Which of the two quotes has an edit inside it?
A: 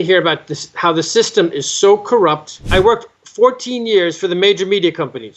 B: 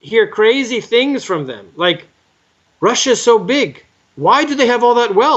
A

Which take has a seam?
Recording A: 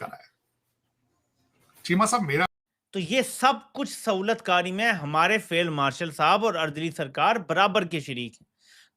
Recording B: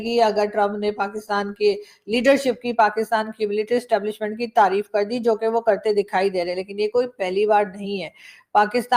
A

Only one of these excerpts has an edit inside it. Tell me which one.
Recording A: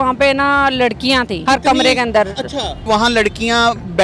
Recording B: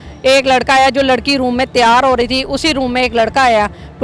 A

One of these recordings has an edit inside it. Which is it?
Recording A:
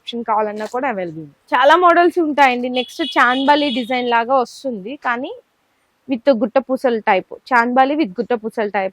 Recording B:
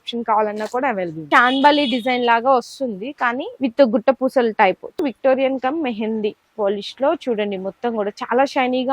B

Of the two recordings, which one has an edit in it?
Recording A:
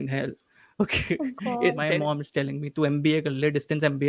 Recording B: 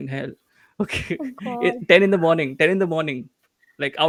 A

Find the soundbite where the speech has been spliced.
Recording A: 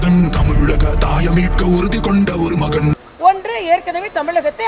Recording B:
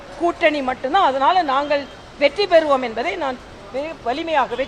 A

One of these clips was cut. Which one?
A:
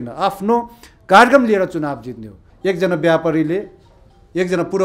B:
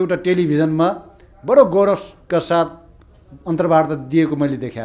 A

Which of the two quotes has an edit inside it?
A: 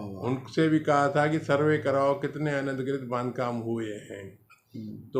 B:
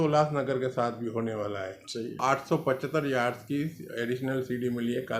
B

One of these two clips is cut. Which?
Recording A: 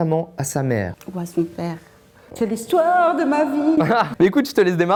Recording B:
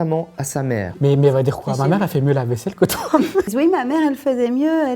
B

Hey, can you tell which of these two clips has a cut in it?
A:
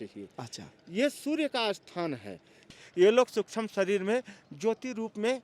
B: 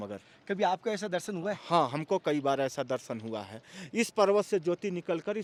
A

